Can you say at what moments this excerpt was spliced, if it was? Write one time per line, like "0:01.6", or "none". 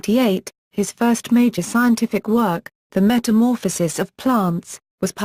0:02.0